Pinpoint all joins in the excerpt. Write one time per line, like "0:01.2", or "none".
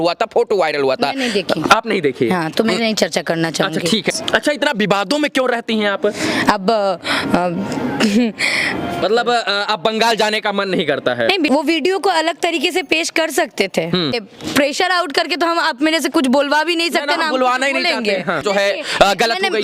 0:04.2
0:09.0
0:11.5
0:14.3
0:18.4